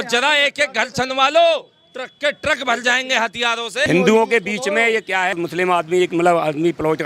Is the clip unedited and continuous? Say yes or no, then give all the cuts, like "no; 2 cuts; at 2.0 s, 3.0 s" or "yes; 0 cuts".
no; 2 cuts; at 3.8 s, 5.3 s